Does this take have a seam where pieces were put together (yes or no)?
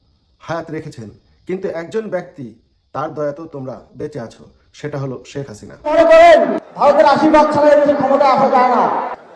yes